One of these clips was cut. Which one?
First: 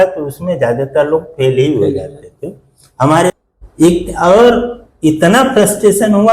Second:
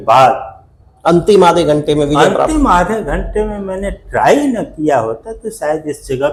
first; 1 cut; at 3.3 s

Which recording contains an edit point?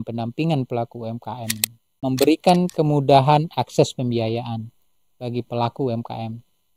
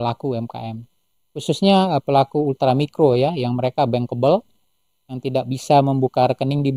first; 1 cut; at 2.0 s

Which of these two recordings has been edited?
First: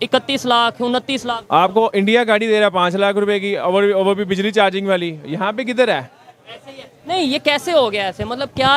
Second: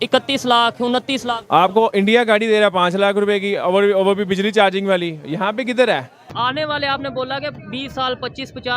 second; 1 cut; at 6.2 s

